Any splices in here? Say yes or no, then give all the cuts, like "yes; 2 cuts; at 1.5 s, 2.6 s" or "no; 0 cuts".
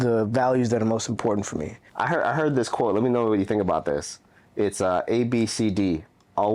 yes; 1 cut; at 1.8 s